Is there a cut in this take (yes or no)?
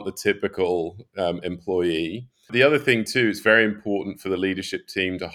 yes